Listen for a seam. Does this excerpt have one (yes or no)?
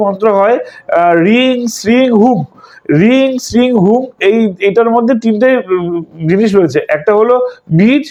no